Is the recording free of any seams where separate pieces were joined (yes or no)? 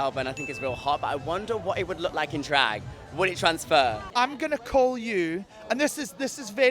no